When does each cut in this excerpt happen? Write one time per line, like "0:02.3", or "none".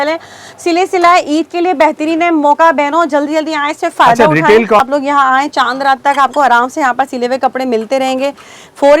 0:04.8